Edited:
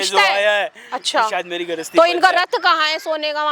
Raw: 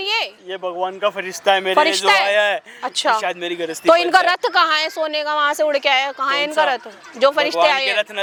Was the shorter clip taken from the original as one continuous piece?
yes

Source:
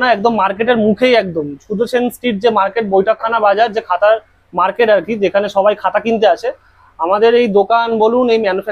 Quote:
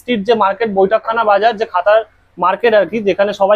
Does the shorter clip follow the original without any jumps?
yes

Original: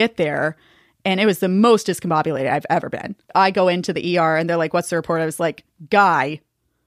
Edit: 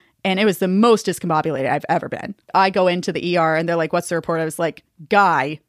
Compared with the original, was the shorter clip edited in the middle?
no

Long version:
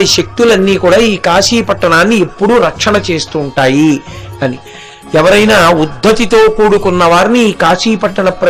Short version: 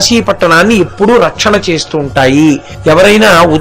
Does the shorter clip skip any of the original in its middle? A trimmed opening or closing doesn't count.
yes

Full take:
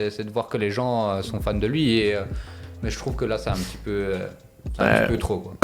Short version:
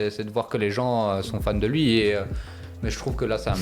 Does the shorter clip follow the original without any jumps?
yes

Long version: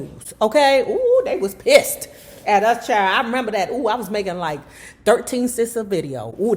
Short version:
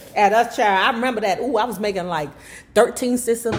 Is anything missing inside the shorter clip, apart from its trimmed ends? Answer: no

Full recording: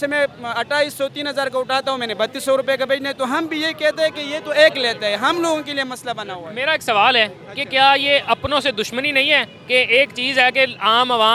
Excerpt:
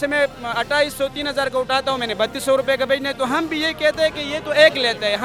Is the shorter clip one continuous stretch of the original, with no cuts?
yes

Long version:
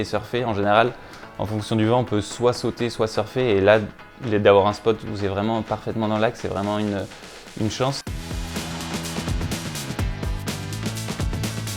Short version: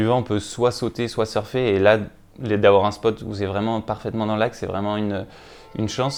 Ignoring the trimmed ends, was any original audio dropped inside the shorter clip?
no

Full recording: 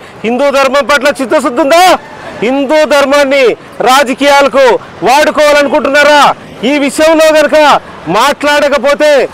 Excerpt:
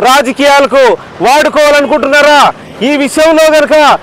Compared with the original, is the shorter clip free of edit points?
yes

